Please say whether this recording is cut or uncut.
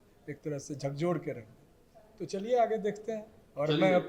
uncut